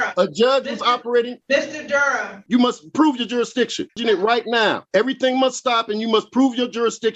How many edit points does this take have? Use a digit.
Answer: 4